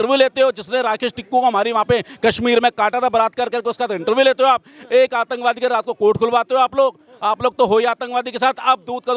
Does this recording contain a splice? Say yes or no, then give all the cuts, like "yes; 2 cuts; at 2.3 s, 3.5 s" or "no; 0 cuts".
no; 0 cuts